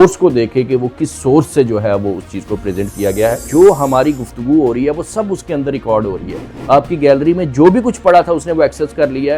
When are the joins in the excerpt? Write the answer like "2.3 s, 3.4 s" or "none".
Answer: 3.4 s, 6.5 s